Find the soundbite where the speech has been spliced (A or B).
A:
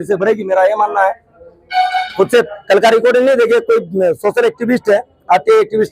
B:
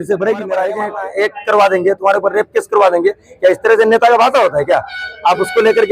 B